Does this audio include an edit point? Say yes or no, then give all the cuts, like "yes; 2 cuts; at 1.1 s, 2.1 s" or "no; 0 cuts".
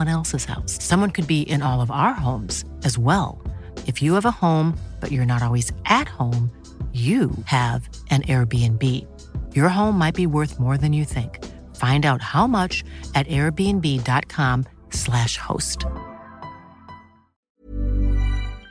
yes; 1 cut; at 17.5 s